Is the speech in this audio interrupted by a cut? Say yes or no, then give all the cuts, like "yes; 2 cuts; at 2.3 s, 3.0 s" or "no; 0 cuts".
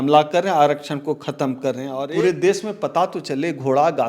yes; 1 cut; at 1.9 s